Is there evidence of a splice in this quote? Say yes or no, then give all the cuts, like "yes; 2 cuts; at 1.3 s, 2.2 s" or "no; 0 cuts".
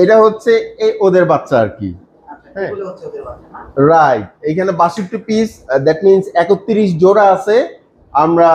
no; 0 cuts